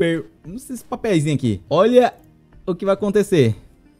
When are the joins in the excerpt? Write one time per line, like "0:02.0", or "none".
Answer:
0:01.6